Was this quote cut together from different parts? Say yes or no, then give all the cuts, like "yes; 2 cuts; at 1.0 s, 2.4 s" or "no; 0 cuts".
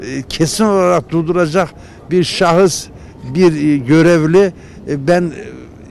no; 0 cuts